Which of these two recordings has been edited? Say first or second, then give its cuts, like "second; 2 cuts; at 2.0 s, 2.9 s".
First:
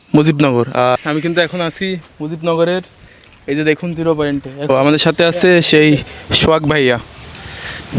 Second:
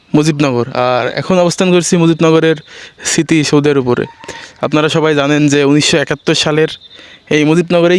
first; 2 cuts; at 1.0 s, 4.5 s